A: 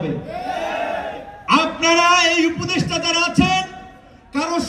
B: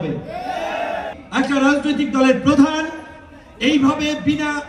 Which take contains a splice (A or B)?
B